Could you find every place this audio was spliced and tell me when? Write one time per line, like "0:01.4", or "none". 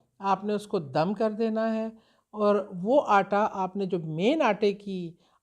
none